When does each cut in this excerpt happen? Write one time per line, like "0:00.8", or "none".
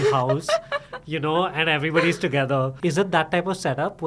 0:02.7